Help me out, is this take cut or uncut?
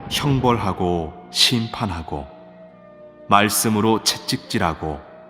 cut